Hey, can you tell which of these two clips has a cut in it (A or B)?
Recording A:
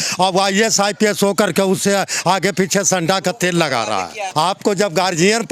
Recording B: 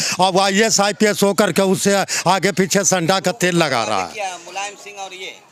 A